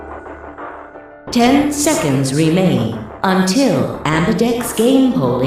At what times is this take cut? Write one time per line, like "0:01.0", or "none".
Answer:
0:01.3